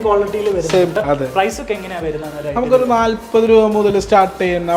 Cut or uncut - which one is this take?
cut